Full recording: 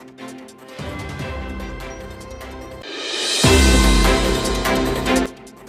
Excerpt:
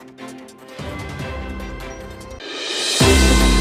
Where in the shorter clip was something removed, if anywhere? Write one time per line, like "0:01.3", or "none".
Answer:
0:02.4